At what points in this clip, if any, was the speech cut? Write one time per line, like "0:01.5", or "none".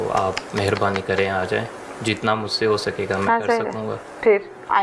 none